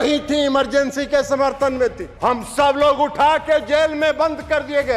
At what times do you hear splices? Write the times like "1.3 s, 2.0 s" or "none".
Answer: 2.1 s